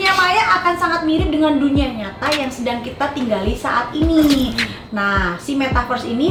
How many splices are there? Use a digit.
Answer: 0